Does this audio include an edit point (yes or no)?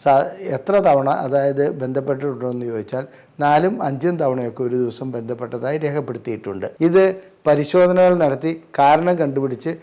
yes